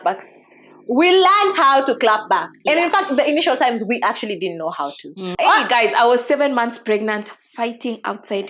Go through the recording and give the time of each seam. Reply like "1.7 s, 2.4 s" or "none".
5.3 s